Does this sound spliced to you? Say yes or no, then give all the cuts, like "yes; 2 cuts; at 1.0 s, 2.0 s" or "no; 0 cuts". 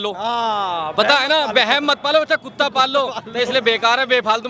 no; 0 cuts